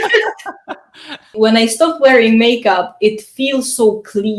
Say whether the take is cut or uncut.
cut